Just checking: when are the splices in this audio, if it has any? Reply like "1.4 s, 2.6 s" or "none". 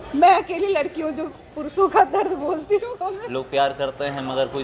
3.2 s